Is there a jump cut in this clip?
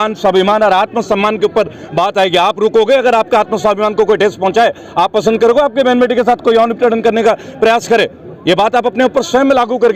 no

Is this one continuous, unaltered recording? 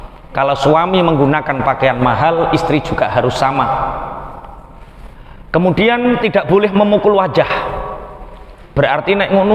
yes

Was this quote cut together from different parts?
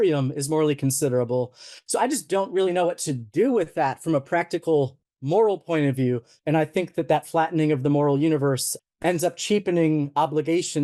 yes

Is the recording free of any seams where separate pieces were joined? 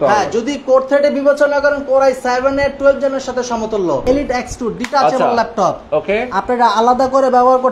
no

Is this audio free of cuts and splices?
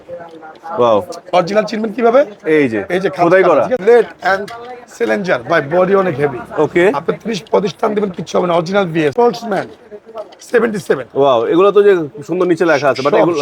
no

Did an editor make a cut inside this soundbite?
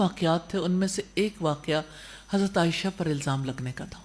no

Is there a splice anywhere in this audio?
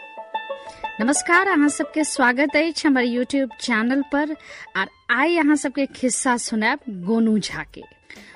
yes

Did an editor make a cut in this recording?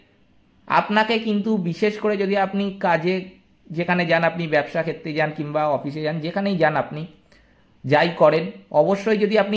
no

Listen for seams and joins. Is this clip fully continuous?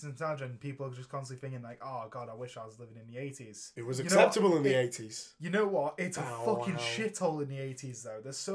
no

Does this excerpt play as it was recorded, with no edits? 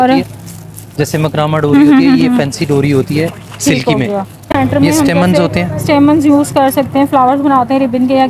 no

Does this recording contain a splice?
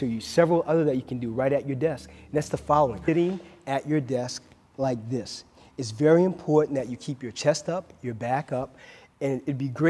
no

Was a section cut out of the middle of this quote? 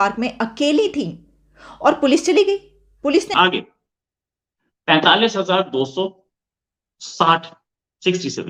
yes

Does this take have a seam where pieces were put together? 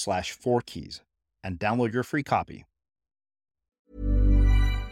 yes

